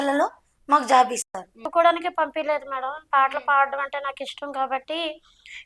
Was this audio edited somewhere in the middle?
yes; 1 cut; at 1.7 s

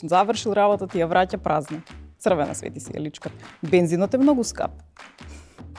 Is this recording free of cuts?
yes; 0 cuts

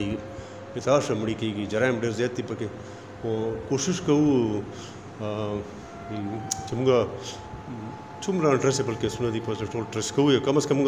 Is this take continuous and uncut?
yes; 0 cuts

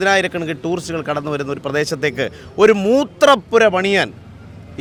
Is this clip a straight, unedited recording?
yes; 0 cuts

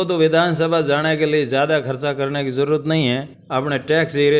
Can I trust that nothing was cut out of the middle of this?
yes; 0 cuts

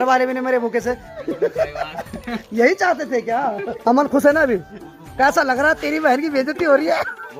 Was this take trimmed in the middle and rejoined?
no; 0 cuts

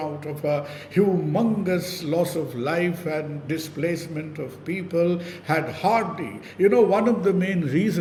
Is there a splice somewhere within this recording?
no; 0 cuts

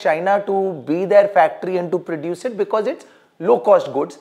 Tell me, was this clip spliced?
no; 0 cuts

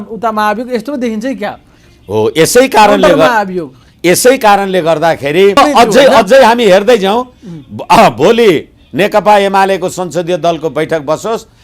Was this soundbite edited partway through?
yes; 1 cut; at 5.6 s

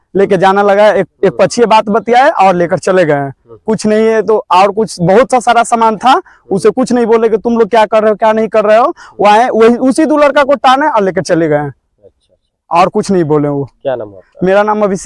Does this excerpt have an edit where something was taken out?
no; 0 cuts

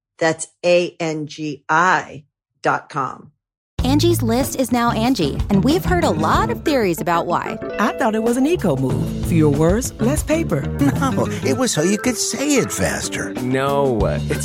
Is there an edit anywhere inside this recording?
yes; 1 cut; at 3.7 s

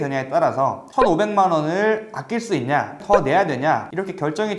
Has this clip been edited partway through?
yes; 1 cut; at 3.0 s

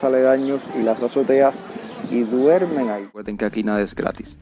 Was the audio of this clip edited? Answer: yes; 1 cut; at 3.3 s

